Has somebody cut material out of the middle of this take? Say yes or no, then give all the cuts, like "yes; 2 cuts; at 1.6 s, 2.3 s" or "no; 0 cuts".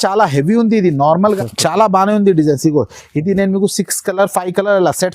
yes; 1 cut; at 1.4 s